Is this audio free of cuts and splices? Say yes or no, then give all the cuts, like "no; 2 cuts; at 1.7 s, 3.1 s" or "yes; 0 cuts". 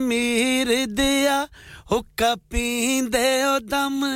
yes; 0 cuts